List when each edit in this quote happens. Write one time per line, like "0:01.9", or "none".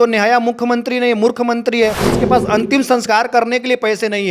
0:02.1